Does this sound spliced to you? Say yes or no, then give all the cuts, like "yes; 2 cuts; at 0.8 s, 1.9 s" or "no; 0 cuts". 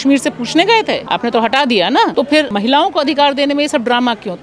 yes; 2 cuts; at 1.1 s, 2.5 s